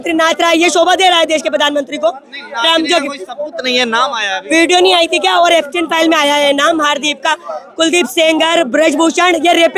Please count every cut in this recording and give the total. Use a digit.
0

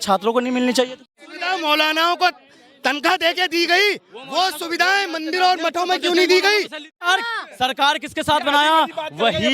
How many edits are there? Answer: 2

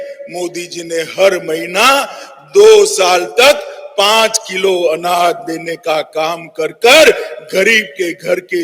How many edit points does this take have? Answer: 0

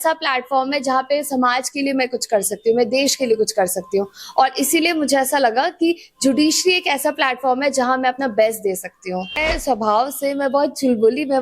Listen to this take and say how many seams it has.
1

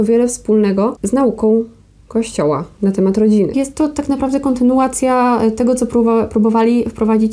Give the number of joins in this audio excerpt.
2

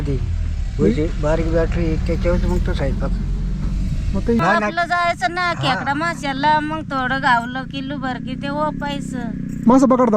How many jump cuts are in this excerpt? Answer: 1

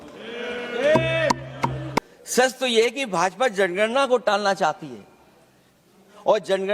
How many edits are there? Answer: 1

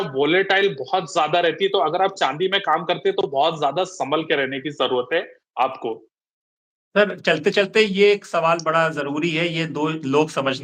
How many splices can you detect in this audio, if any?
0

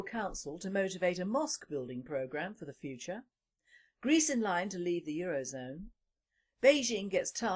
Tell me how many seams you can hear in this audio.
0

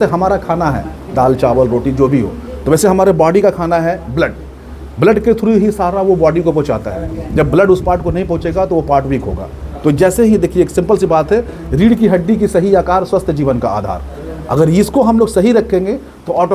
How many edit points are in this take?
0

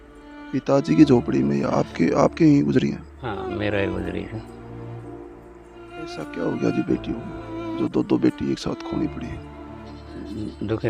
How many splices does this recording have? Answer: 3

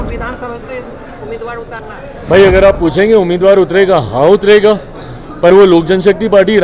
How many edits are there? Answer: 0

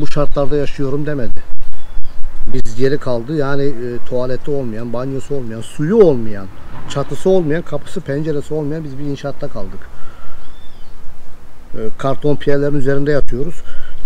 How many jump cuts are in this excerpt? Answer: 0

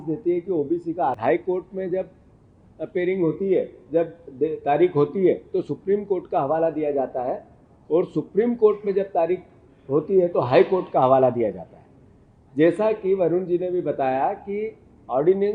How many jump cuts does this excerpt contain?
1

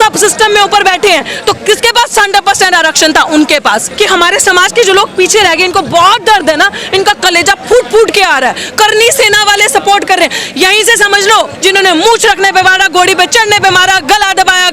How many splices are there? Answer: 2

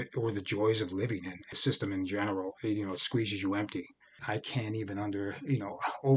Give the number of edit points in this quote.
2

